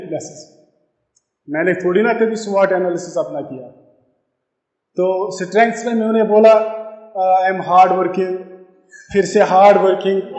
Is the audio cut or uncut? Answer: uncut